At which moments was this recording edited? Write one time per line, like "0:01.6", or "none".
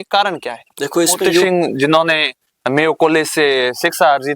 0:01.4